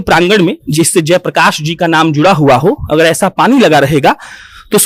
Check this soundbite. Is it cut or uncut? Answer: uncut